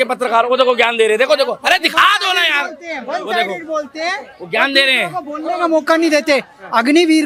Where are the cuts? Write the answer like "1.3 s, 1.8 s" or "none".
none